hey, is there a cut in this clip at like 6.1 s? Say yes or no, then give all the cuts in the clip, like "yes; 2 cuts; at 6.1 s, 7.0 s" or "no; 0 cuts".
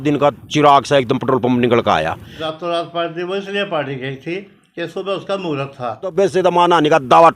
yes; 2 cuts; at 2.4 s, 6.1 s